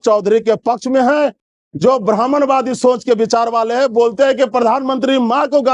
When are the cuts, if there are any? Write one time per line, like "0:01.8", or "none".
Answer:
0:01.5